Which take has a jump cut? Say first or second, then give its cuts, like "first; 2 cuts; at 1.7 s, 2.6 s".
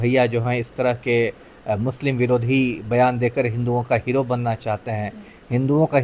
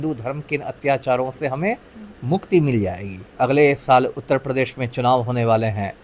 second; 1 cut; at 3.3 s